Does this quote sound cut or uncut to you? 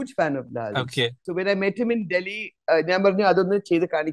cut